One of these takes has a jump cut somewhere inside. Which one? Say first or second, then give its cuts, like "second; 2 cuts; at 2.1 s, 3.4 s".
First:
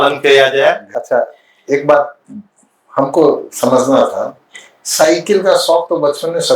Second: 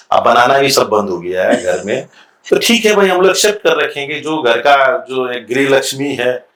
first; 1 cut; at 0.9 s